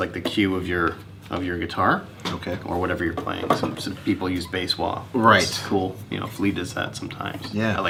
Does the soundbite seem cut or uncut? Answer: uncut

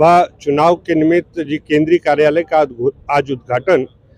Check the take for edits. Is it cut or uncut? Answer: uncut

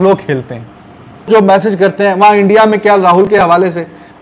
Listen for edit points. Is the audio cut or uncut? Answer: cut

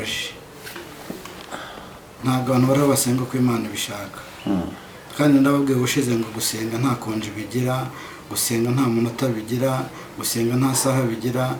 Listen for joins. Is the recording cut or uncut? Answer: uncut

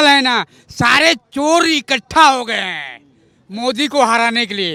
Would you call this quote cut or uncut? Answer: uncut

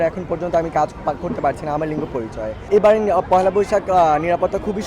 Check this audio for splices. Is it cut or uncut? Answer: cut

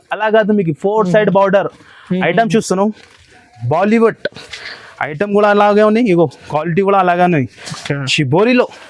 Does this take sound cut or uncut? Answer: uncut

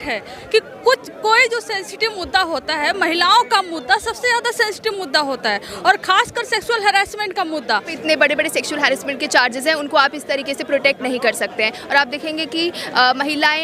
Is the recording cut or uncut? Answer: cut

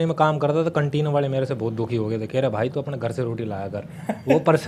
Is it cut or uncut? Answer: uncut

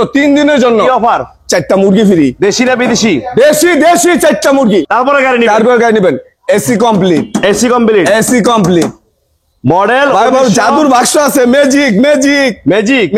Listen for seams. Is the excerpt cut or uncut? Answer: cut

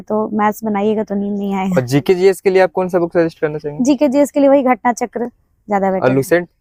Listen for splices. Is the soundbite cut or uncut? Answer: uncut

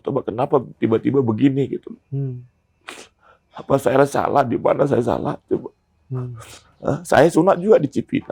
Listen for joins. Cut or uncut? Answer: uncut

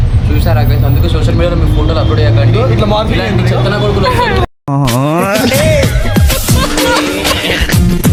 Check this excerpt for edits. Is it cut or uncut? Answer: uncut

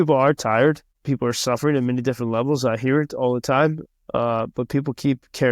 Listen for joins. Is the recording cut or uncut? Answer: cut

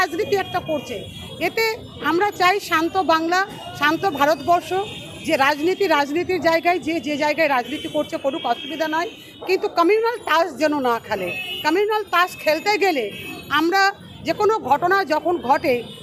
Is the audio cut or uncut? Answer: uncut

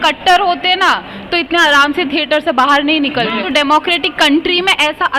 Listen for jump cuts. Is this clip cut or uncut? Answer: cut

